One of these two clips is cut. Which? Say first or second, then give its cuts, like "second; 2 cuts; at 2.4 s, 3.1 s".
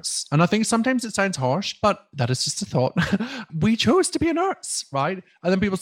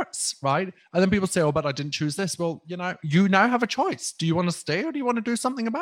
first; 1 cut; at 3.5 s